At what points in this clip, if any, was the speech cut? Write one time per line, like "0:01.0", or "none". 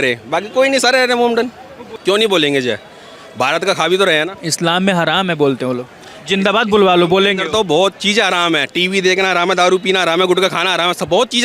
0:01.9